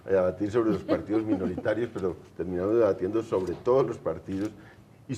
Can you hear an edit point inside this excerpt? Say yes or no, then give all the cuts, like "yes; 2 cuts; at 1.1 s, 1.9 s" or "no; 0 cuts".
yes; 1 cut; at 3.6 s